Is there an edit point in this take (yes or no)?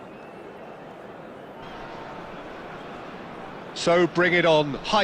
yes